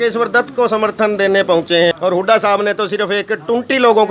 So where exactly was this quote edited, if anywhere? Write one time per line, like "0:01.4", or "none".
0:01.9

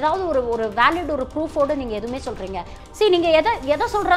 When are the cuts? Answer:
0:02.7

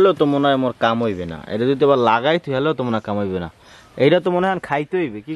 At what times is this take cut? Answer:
none

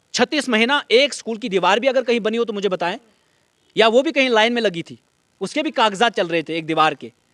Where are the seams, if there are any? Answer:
none

